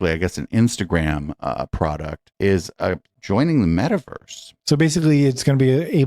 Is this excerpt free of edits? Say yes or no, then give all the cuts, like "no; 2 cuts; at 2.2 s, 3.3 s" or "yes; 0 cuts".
no; 1 cut; at 4.5 s